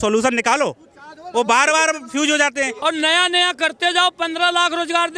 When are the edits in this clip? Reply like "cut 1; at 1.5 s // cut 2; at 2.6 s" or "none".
cut 1; at 2.7 s